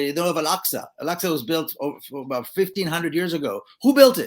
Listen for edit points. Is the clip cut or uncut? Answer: uncut